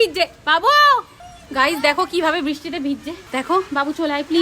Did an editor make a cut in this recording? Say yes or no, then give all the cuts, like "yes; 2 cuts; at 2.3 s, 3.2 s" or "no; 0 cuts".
no; 0 cuts